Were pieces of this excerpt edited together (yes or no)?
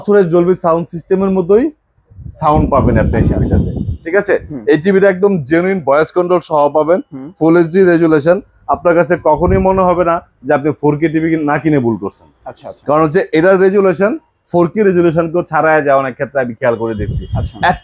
no